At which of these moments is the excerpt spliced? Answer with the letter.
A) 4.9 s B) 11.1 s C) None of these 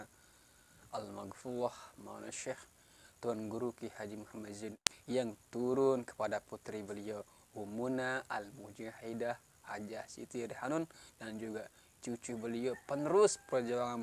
A